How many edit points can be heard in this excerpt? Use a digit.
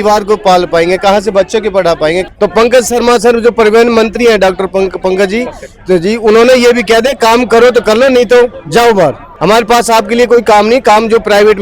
2